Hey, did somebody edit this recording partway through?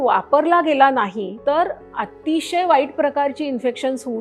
yes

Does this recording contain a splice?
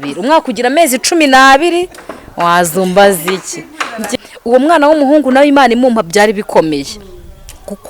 yes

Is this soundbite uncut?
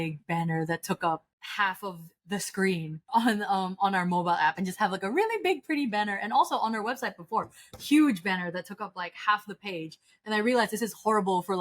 no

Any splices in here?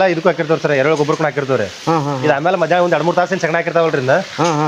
no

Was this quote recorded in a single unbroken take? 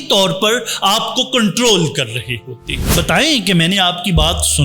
no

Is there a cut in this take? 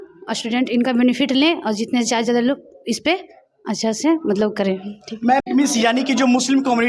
yes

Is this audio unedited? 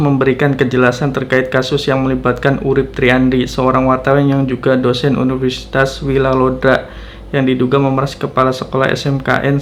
yes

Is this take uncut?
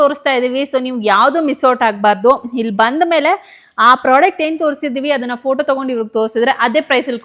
yes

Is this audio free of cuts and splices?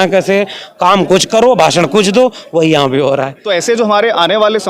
no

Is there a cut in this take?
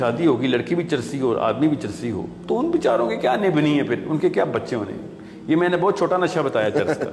no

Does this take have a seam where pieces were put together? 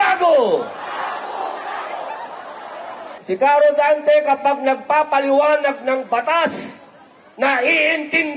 yes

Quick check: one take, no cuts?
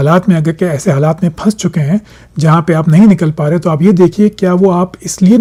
yes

